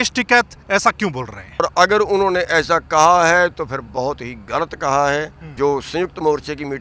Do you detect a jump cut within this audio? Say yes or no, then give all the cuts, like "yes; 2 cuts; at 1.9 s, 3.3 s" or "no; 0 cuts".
yes; 2 cuts; at 1.6 s, 5.5 s